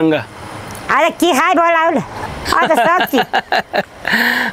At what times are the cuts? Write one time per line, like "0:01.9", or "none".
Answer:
0:02.2